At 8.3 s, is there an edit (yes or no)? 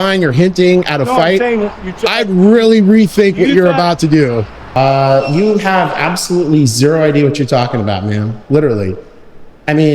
no